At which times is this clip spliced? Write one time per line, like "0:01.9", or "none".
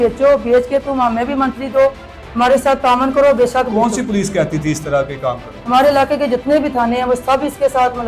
none